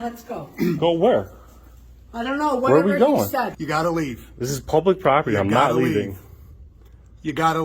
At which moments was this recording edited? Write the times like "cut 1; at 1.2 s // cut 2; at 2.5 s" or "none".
cut 1; at 3.5 s